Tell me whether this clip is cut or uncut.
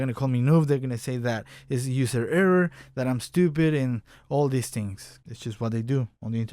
cut